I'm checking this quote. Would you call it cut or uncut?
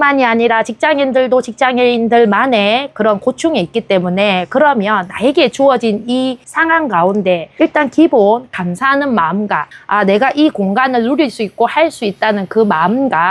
uncut